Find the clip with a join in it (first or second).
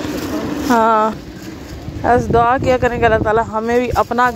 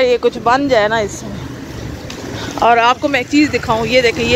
first